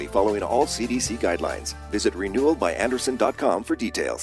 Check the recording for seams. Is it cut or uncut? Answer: uncut